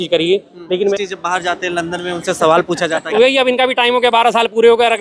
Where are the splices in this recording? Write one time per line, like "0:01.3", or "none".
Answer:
0:00.9
0:03.1